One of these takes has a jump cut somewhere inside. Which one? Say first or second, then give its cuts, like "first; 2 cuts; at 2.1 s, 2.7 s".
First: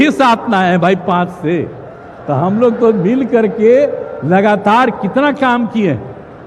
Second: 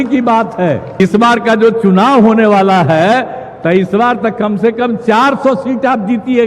second; 1 cut; at 1.0 s